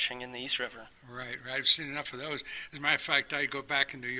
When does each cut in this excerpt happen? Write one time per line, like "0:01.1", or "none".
0:01.7